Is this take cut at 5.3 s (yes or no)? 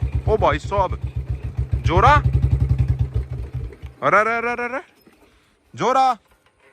no